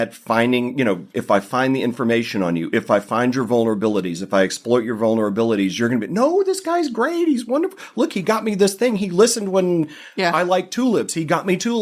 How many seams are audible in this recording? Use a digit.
1